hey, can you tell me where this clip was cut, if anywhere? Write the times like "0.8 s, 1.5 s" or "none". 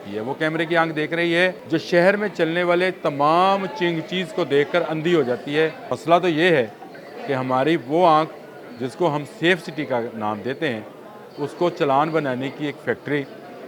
1.6 s, 5.9 s

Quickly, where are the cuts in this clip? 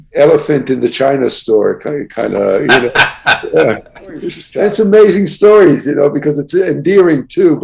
4.4 s

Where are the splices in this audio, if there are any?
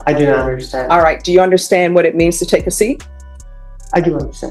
none

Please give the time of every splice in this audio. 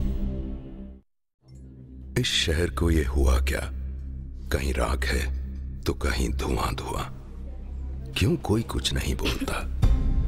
1.1 s

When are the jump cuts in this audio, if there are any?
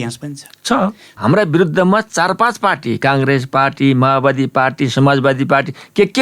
1.1 s

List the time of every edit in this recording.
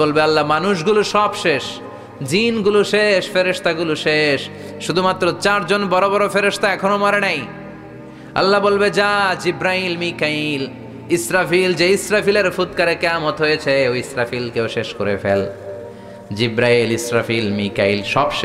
none

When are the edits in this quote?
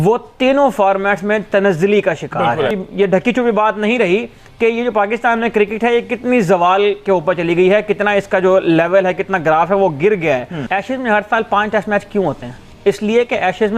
2.8 s, 10.5 s

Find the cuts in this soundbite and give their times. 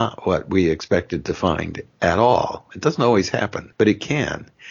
3.6 s

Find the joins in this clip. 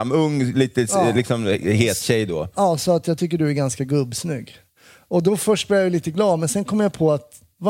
none

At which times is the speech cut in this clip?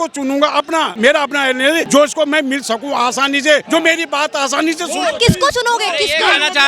0.9 s, 1.9 s, 3.6 s

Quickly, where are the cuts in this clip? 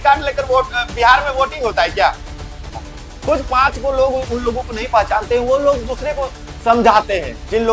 2.8 s

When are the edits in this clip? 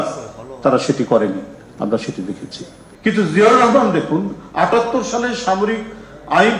2.8 s

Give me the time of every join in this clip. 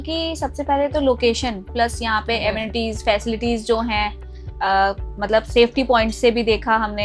1.7 s

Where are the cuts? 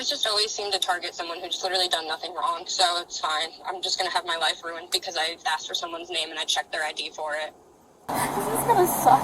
8.1 s

